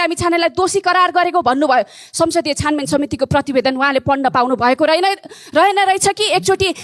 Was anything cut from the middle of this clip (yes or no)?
no